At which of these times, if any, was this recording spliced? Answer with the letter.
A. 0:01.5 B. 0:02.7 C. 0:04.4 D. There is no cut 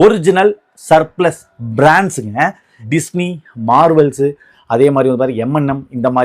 B